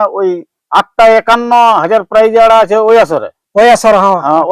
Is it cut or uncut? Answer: uncut